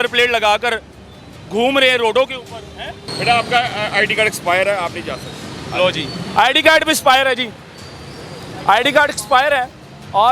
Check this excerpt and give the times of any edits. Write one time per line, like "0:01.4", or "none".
0:03.0